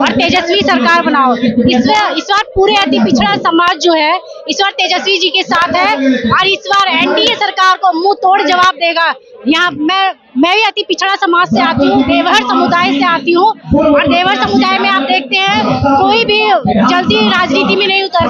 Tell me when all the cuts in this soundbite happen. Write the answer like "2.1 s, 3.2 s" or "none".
none

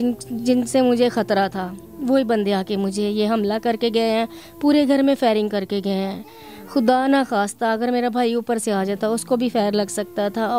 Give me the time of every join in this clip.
none

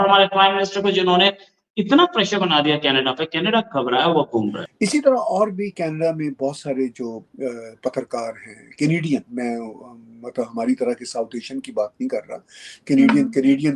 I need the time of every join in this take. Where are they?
4.6 s

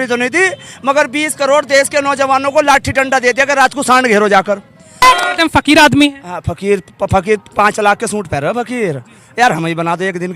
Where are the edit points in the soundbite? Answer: 5.0 s

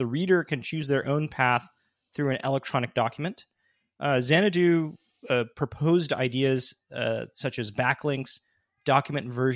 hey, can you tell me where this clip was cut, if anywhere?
none

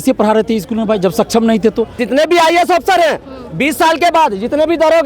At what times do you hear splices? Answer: 2.0 s

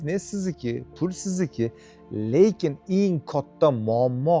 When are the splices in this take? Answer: none

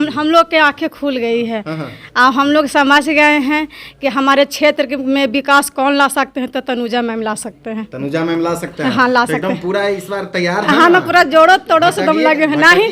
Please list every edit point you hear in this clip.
none

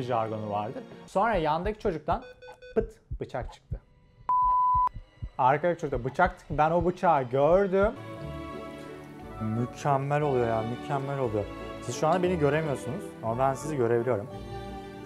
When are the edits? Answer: 1.1 s, 8.0 s

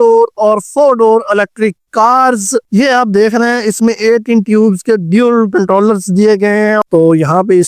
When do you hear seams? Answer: 2.7 s, 6.8 s

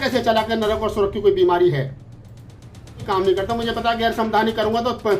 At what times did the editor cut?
3.0 s

